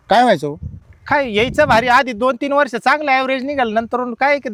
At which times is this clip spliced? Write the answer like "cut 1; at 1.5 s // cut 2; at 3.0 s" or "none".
none